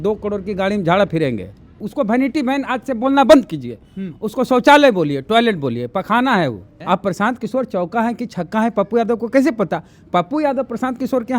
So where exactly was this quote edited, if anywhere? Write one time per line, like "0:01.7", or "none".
0:01.8
0:06.7